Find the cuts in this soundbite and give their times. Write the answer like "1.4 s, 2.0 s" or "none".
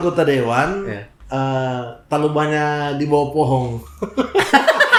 none